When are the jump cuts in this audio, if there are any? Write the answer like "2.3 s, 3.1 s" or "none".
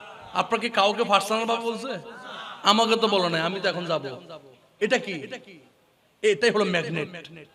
none